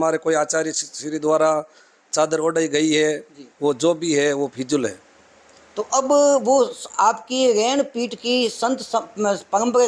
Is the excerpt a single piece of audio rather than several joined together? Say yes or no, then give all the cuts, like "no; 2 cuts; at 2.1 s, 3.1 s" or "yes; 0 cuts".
yes; 0 cuts